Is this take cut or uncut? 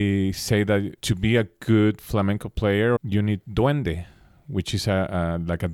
cut